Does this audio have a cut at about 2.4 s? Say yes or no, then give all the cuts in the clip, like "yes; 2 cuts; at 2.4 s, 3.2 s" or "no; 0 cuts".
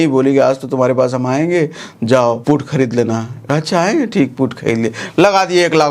yes; 1 cut; at 2.4 s